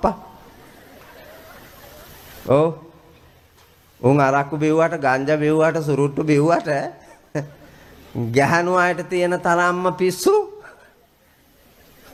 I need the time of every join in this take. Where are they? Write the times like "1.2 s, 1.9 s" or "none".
none